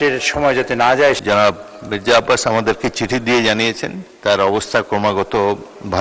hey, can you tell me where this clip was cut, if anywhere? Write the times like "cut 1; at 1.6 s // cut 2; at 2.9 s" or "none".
cut 1; at 1.2 s